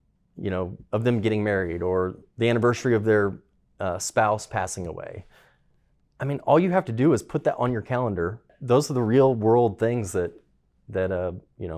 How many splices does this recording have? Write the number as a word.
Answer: one